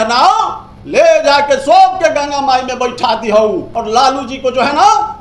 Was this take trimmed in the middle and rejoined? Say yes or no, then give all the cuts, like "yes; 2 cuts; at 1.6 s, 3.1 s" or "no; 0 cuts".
yes; 1 cut; at 3.7 s